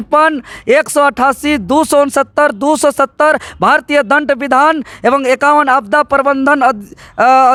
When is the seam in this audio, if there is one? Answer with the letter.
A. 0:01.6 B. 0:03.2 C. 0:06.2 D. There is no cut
D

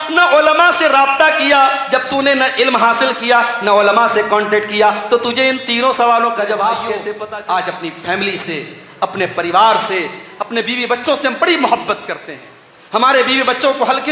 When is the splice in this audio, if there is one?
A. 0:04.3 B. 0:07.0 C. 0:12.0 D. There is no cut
B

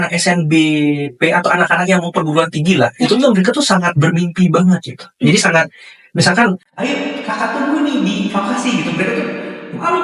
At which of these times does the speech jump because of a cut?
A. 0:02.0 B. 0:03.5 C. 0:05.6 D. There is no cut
D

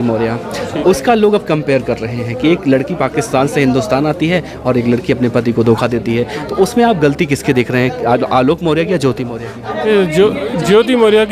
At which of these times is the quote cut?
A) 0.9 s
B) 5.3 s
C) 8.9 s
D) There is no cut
D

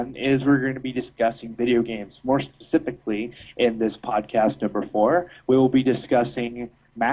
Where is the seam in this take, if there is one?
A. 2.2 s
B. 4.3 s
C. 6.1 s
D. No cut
B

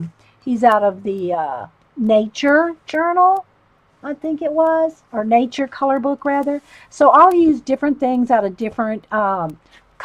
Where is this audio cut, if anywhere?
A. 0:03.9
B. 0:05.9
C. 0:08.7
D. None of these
D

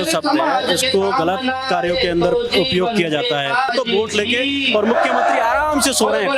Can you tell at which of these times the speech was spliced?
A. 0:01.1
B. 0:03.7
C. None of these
B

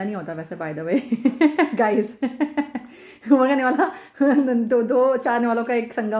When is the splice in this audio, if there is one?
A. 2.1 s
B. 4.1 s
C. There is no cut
C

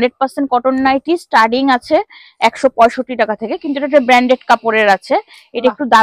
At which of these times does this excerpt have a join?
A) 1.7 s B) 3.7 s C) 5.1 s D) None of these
D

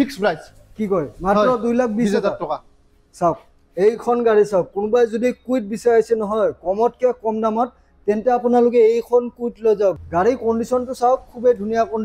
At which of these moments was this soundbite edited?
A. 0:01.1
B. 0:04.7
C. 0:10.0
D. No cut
C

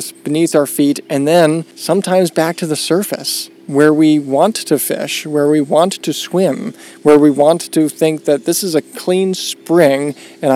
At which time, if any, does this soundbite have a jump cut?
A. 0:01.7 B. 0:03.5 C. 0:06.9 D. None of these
A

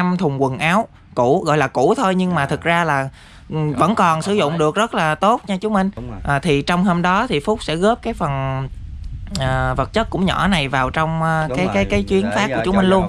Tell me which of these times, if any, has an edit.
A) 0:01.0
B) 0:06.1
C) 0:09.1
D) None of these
B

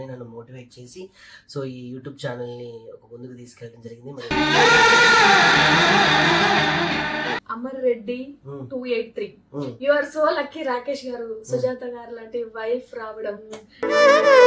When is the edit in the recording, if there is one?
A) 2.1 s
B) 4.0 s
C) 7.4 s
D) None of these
C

